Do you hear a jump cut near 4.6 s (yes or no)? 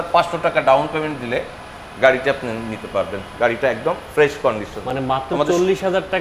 no